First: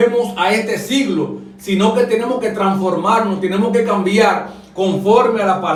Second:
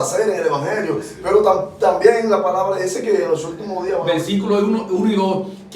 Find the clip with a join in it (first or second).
second